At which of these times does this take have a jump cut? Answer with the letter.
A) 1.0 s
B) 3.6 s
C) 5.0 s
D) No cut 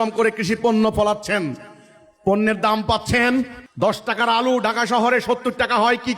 B